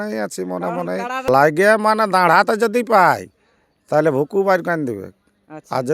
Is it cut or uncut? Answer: cut